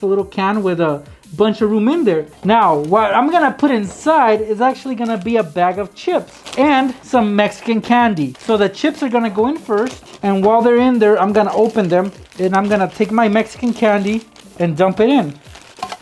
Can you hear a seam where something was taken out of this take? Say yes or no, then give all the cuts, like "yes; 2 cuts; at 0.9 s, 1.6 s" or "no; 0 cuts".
yes; 5 cuts; at 2.3 s, 7.0 s, 8.4 s, 10.0 s, 12.2 s